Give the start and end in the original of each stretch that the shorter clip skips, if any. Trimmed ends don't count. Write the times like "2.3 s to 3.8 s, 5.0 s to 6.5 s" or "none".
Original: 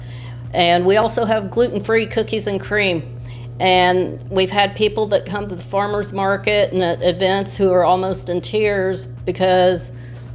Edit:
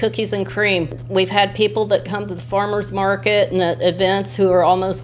3.1 s to 4.2 s